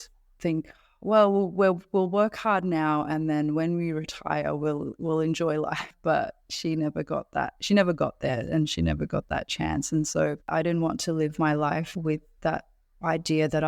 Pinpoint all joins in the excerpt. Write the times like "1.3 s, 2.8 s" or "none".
5.9 s, 10.5 s